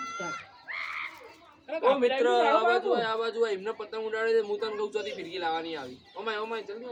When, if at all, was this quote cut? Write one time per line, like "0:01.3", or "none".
none